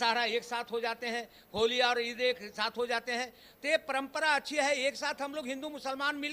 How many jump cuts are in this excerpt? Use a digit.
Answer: 0